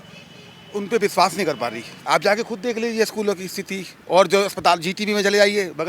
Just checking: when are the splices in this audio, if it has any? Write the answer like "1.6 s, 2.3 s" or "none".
2.0 s